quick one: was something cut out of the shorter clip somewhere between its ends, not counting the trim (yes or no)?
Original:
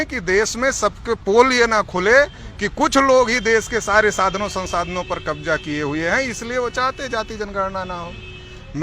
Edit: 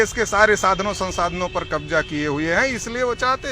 no